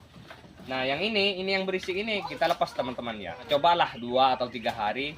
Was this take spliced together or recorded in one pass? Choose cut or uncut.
cut